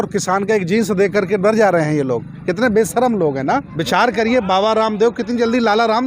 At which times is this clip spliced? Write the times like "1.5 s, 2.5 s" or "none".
3.7 s